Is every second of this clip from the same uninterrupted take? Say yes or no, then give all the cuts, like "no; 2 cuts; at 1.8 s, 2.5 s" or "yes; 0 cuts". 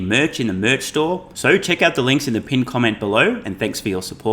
no; 1 cut; at 1.3 s